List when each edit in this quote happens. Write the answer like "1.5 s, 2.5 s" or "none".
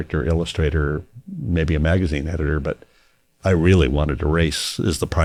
none